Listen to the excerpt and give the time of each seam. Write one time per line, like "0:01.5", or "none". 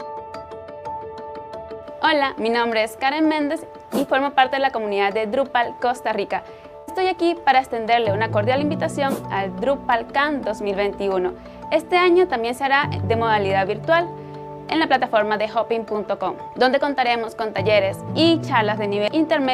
none